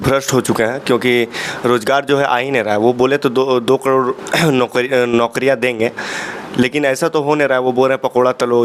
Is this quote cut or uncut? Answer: uncut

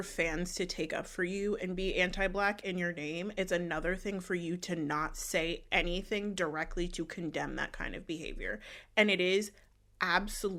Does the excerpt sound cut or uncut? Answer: uncut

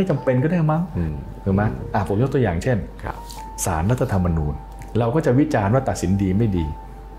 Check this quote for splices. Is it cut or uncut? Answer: cut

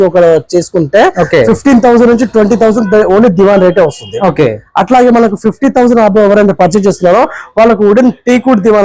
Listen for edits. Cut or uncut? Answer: uncut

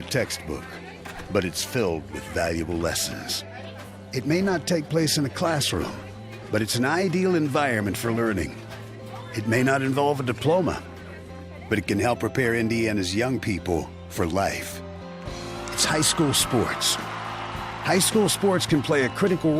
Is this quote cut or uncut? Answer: cut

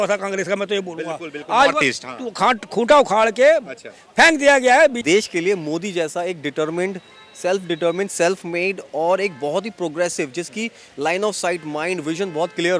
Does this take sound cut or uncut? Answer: cut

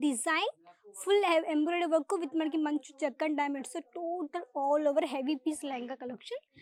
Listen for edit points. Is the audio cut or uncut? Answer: uncut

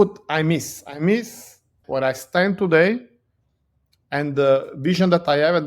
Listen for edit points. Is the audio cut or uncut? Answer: cut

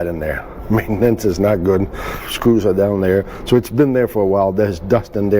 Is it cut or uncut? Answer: cut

